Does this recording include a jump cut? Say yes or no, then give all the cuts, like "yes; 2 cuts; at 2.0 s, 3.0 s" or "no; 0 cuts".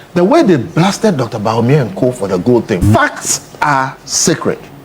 yes; 1 cut; at 2.9 s